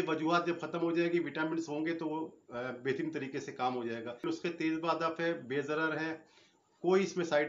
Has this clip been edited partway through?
yes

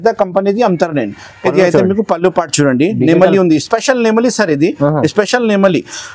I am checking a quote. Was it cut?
no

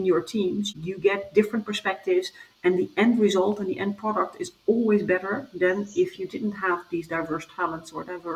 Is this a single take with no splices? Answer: yes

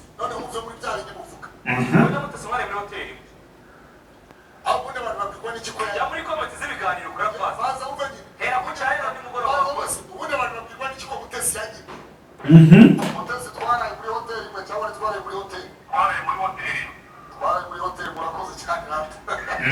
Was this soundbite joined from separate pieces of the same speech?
no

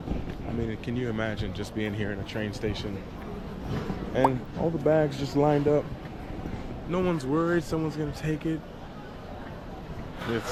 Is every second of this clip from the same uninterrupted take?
yes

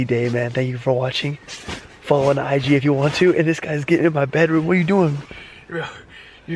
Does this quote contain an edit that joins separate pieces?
no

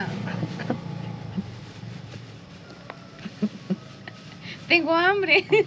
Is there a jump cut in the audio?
no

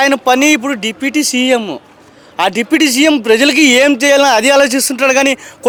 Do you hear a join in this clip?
no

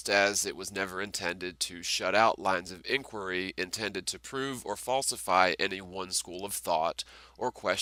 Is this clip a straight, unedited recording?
yes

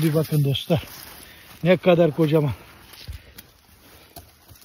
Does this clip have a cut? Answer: no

